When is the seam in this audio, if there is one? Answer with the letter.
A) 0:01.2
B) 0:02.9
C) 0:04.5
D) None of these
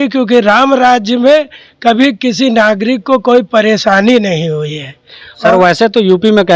D